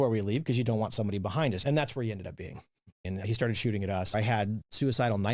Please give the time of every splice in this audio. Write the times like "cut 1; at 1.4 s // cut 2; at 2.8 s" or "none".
cut 1; at 1.6 s // cut 2; at 3.1 s // cut 3; at 4.1 s